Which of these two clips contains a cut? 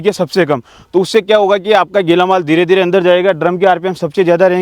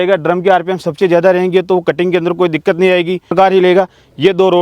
second; 1 cut; at 3.3 s

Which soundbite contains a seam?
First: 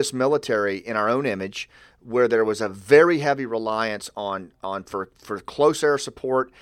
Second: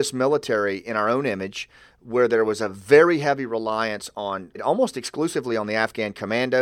second; 1 cut; at 4.6 s

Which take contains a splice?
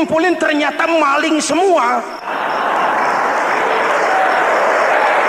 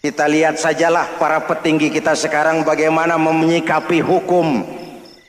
first; 1 cut; at 2.2 s

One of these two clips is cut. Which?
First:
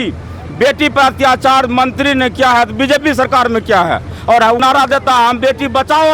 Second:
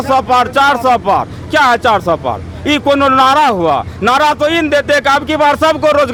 first; 1 cut; at 4.6 s

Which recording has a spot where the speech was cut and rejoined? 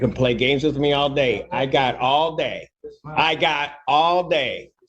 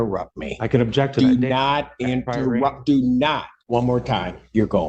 second; 1 cut; at 3.5 s

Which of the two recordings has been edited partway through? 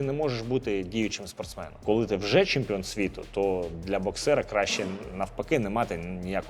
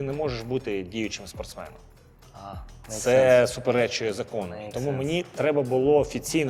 first; 1 cut; at 1.8 s

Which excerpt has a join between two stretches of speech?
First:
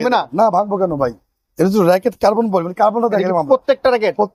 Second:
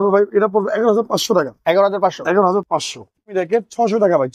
second; 1 cut; at 3.3 s

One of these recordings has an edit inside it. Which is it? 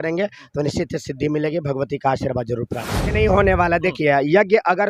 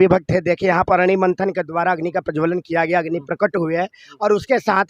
first; 1 cut; at 3.0 s

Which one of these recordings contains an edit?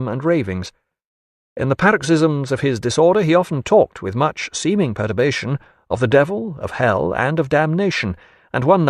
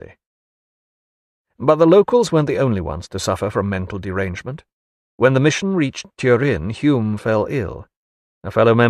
first; 1 cut; at 2.0 s

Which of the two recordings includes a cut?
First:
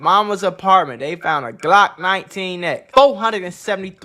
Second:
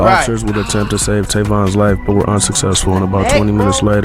first; 1 cut; at 2.8 s

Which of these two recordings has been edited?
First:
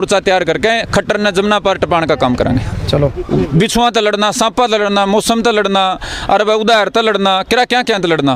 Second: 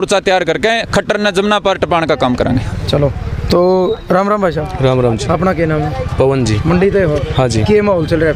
first; 1 cut; at 3.2 s

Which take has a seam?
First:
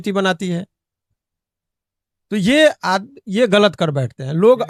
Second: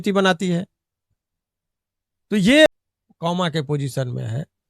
second; 1 cut; at 2.7 s

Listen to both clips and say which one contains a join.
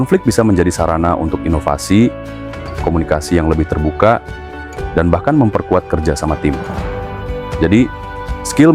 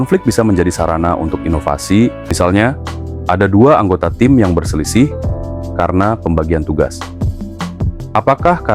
second; 1 cut; at 2.3 s

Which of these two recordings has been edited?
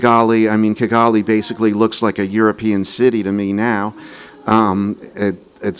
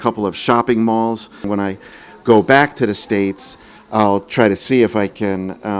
second; 1 cut; at 1.4 s

